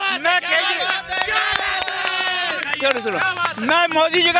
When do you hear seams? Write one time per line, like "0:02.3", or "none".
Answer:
none

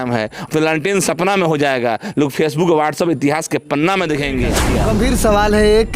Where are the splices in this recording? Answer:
0:04.7

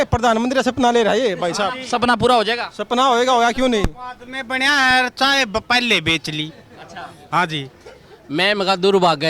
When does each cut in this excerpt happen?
none

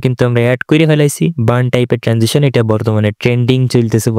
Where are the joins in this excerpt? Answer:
none

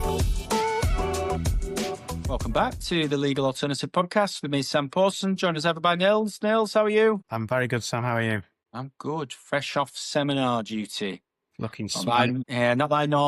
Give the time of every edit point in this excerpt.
0:02.1

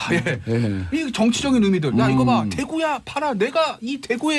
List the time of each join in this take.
0:02.5

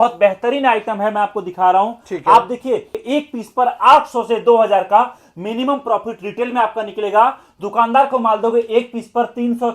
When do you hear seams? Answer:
0:03.0

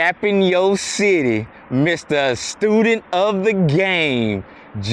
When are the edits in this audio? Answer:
none

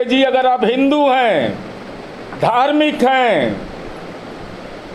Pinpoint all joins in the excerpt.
none

